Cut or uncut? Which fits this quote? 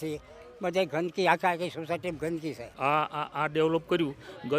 cut